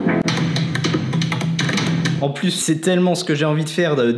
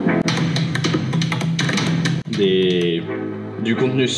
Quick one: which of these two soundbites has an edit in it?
first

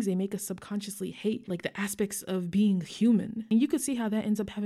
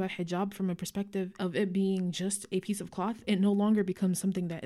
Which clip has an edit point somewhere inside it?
first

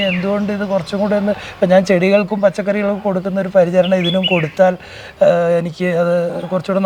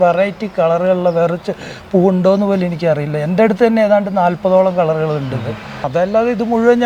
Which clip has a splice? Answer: second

